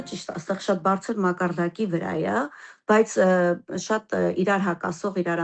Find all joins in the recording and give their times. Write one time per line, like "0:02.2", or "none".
none